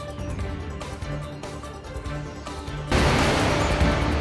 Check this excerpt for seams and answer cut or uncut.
cut